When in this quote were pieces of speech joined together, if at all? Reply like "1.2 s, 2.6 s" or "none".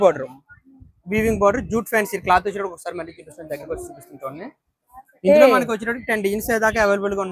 none

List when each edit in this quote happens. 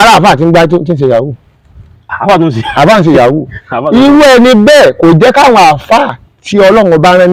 none

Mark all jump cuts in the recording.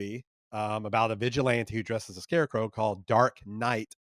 none

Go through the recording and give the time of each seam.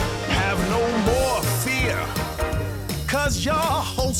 none

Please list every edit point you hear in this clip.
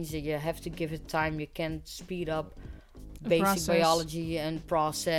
none

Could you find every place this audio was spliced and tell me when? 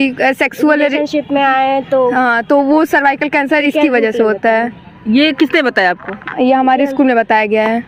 none

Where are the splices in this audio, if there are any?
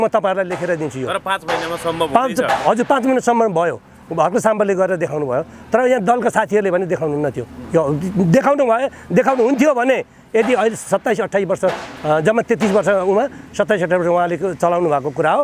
none

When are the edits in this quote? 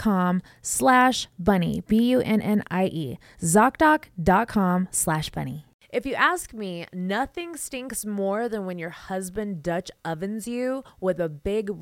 5.8 s

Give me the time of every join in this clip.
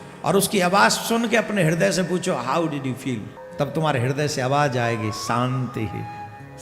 3.4 s

